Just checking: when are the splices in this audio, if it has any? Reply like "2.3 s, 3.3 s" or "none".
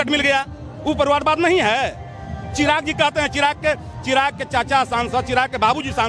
none